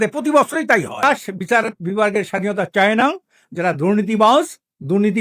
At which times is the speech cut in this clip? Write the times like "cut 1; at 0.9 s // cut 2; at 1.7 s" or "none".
cut 1; at 1.0 s